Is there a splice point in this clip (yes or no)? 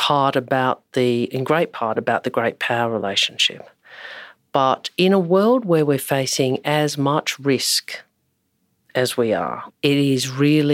yes